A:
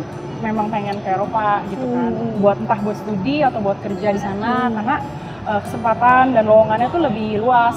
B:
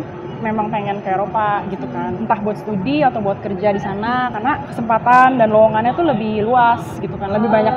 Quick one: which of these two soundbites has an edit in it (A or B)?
B